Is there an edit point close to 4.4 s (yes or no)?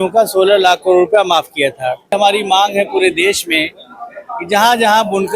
no